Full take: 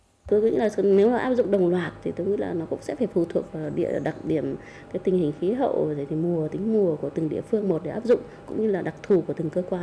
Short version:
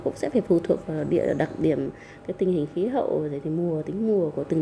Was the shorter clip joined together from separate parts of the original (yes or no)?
no